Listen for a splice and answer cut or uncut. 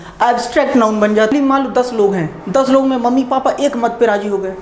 cut